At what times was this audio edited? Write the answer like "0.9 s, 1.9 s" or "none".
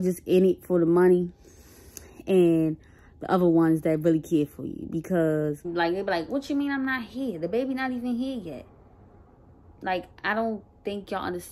5.6 s